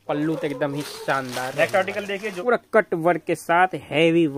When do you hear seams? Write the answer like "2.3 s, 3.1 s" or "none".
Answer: 2.3 s

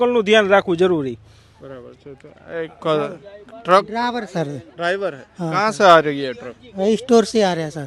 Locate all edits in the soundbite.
none

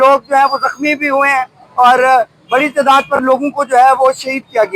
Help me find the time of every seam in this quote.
none

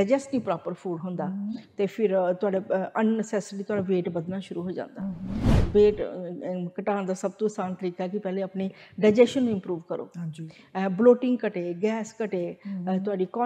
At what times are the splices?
5.6 s

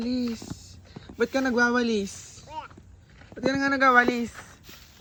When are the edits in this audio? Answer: none

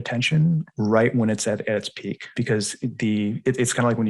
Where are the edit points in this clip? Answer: 2.4 s

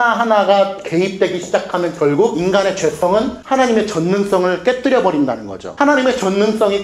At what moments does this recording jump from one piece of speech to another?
2.8 s

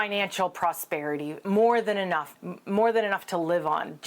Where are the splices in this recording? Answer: 1.4 s, 2.3 s

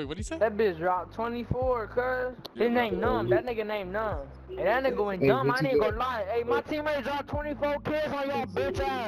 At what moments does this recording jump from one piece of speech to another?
2.4 s, 4.4 s

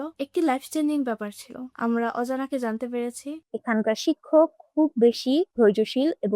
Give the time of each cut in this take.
3.4 s

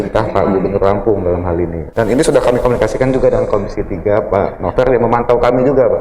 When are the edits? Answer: none

